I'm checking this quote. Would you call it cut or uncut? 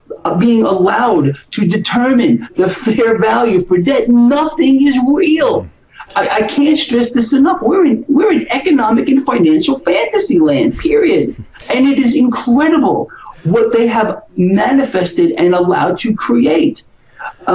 uncut